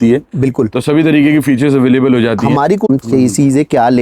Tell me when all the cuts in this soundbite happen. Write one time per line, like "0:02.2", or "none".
0:02.8